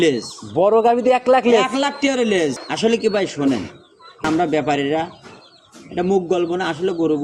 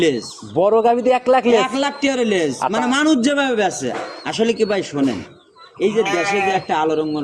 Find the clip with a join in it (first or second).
first